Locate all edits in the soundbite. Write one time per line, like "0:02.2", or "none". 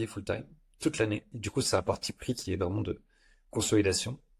0:01.4